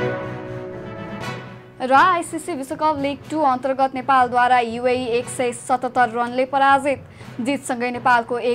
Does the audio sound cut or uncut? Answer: uncut